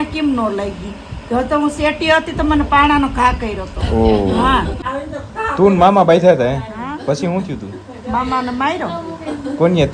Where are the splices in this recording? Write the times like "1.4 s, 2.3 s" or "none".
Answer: 4.9 s